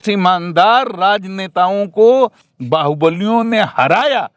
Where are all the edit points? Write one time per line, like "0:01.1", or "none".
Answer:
none